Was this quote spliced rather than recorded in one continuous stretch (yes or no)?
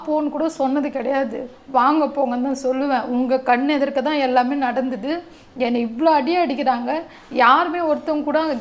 no